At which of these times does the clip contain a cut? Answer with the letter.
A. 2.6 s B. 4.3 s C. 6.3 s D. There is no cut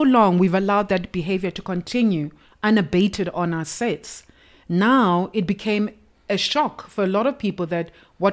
D